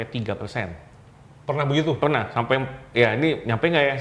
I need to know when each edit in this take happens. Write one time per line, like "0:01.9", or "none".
none